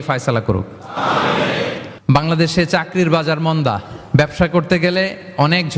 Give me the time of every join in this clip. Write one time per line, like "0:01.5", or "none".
0:01.9